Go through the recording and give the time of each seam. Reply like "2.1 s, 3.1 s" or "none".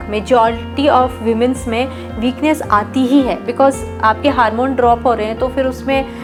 none